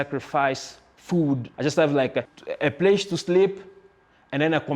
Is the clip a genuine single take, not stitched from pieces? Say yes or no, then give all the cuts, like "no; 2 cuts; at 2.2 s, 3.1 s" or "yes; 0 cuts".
no; 2 cuts; at 1.5 s, 2.4 s